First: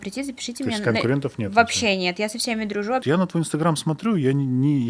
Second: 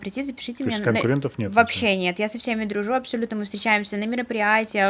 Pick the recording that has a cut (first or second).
first